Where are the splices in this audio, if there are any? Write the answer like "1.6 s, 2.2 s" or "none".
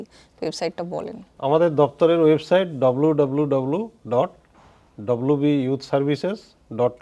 none